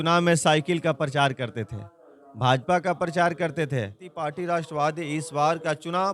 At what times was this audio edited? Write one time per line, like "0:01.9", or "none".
0:04.1